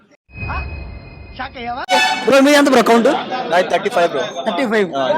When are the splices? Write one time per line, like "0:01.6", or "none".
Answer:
0:01.9